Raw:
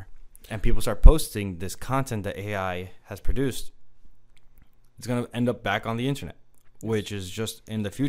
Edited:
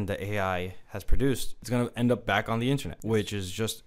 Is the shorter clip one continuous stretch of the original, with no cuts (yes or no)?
no